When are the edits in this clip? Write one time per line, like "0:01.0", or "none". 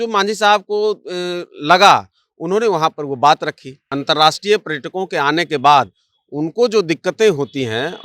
0:03.9